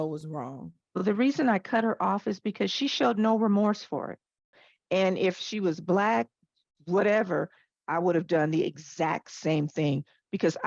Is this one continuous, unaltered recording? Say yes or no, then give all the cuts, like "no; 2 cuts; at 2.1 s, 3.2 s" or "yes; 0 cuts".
no; 2 cuts; at 1.0 s, 4.6 s